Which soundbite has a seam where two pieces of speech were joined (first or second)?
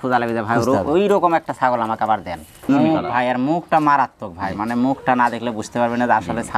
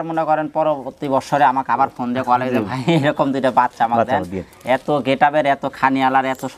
first